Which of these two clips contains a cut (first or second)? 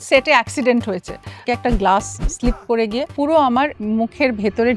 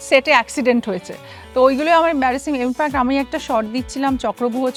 first